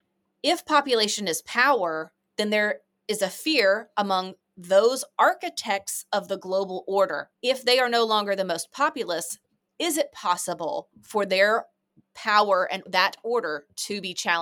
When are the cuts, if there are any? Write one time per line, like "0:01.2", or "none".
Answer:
0:07.3
0:12.9